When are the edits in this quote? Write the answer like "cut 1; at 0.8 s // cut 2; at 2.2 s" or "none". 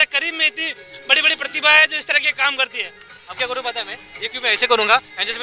cut 1; at 3.4 s